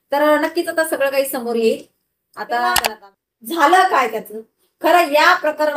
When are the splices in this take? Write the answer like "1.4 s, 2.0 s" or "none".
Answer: 2.9 s